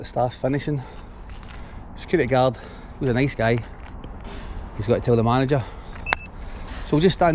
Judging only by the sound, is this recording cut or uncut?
uncut